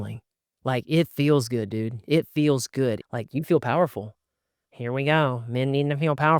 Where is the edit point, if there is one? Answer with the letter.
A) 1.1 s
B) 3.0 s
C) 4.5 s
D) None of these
B